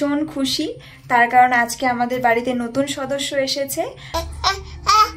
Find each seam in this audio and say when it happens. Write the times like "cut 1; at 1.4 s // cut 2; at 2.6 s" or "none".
cut 1; at 4.0 s